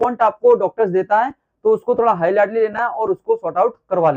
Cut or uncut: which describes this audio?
uncut